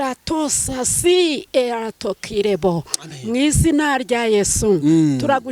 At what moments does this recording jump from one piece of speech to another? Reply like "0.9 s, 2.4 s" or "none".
none